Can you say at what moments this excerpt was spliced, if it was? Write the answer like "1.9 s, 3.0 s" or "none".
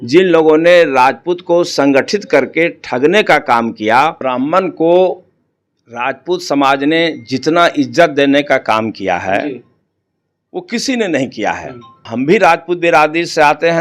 4.2 s, 12.1 s